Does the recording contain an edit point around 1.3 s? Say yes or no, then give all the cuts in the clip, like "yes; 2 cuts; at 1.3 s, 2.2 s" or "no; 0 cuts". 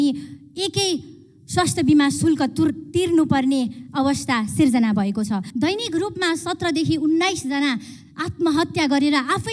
no; 1 cut; at 5.5 s